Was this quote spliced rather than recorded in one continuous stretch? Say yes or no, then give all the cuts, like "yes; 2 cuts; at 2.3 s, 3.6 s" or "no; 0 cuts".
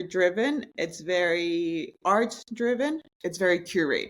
yes; 1 cut; at 3.2 s